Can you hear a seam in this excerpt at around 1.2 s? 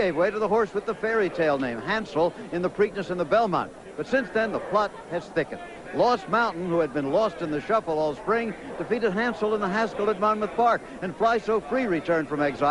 yes; 1 cut; at 1.2 s

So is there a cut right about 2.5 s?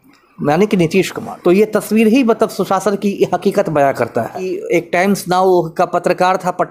no; 2 cuts; at 1.2 s, 4.5 s

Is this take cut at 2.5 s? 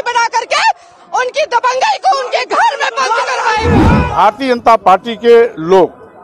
no; 1 cut; at 4.0 s

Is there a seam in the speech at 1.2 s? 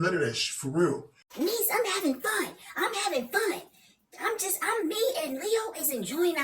yes; 1 cut; at 1.2 s

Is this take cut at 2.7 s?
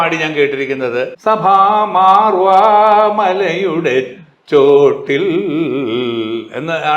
no; 1 cut; at 1.1 s

